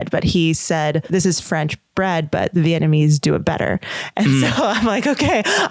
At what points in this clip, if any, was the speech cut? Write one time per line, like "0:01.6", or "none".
0:01.1